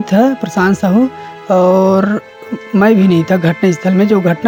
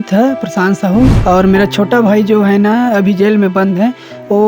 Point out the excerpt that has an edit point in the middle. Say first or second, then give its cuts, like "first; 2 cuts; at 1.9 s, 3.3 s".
second; 1 cut; at 1.2 s